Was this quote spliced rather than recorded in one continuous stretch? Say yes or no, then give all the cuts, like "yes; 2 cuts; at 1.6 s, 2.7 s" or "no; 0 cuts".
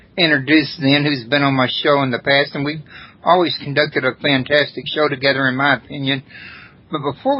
yes; 1 cut; at 5.3 s